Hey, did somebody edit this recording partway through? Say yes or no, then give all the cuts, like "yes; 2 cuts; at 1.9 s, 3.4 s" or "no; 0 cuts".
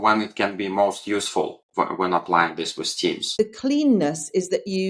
yes; 1 cut; at 3.4 s